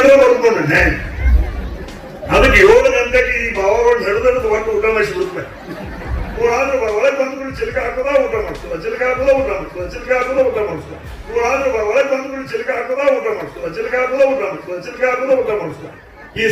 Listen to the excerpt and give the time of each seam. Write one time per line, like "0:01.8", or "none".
0:06.4
0:11.4

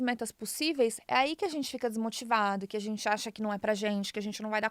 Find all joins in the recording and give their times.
none

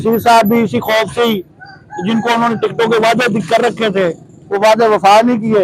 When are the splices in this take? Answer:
none

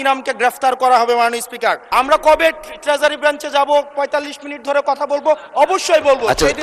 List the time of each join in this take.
0:01.9

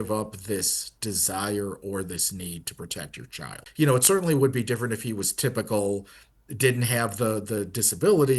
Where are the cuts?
0:03.6

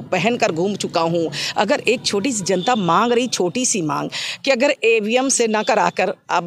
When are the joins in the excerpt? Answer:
none

